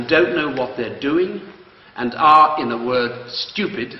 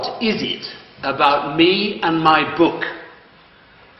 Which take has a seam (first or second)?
first